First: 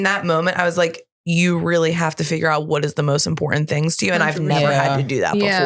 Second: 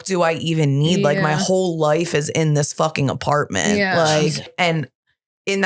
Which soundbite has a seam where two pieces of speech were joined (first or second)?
second